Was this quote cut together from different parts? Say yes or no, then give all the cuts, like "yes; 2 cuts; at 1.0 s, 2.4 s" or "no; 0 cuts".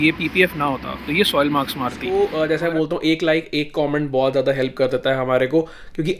yes; 1 cut; at 2.0 s